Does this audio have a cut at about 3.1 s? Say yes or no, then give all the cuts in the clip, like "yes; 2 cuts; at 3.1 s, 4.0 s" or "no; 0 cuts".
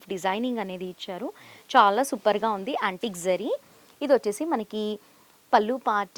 no; 0 cuts